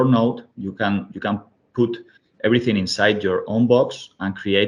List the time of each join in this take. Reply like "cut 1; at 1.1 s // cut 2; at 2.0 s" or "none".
none